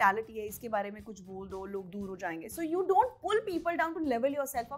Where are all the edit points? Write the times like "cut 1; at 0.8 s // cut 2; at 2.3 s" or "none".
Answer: none